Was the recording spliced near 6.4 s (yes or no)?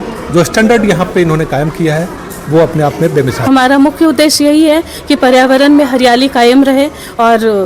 no